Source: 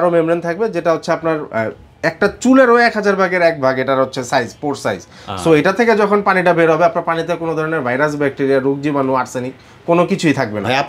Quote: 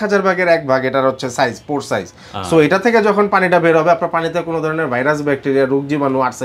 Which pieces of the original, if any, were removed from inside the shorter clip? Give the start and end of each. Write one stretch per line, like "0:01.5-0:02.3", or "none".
none